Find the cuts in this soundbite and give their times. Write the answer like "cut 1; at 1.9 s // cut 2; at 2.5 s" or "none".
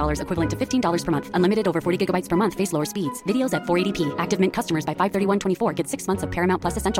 none